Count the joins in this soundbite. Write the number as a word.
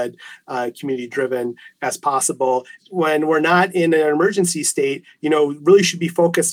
one